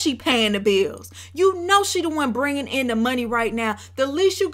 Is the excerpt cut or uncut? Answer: uncut